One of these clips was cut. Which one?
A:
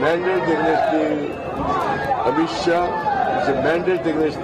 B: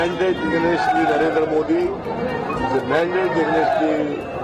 A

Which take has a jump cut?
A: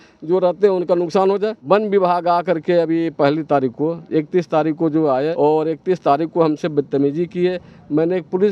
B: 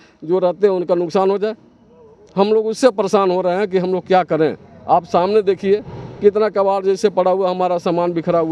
A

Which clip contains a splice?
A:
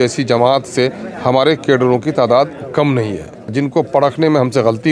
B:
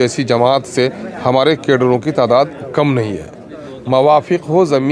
A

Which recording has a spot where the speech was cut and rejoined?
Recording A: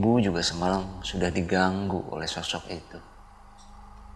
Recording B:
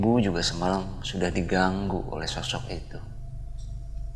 B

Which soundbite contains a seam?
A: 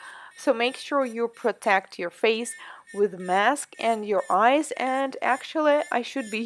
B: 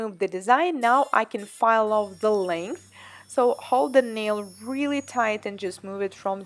B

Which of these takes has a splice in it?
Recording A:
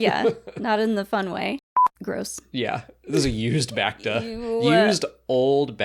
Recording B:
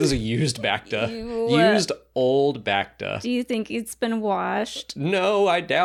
A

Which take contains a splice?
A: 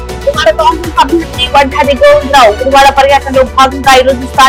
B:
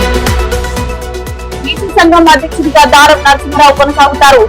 B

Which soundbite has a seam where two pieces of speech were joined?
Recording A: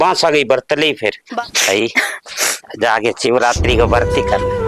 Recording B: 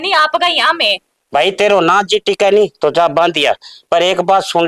A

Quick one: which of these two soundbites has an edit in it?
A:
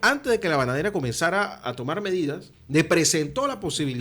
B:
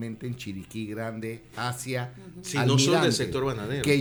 A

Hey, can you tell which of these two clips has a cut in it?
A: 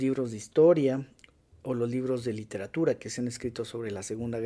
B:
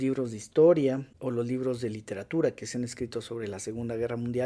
B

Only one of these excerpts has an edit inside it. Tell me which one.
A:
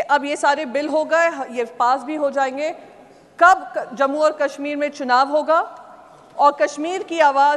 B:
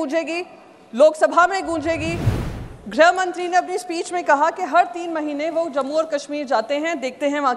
B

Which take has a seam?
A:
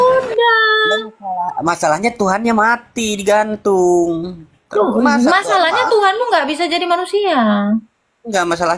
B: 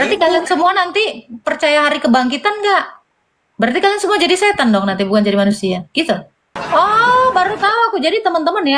B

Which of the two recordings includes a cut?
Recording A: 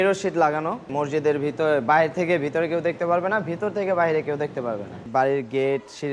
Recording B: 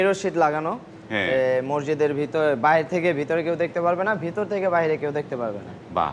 A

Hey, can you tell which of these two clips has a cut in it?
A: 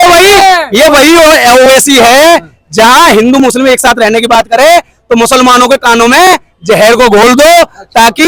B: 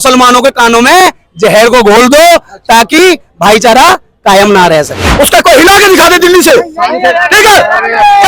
B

